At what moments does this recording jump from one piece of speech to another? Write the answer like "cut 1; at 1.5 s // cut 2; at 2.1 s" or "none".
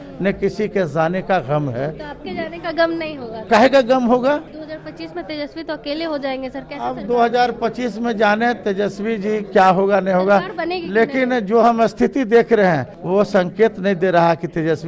cut 1; at 3.4 s // cut 2; at 4.6 s // cut 3; at 12.9 s